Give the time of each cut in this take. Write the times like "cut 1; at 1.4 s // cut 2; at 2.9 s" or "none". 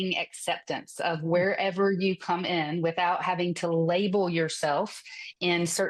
none